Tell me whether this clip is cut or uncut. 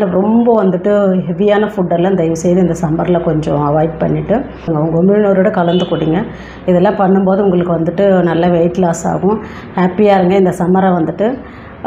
cut